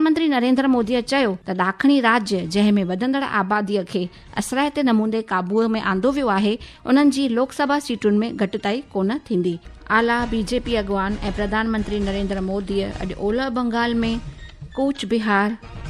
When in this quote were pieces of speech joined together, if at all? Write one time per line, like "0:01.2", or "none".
0:01.4
0:09.7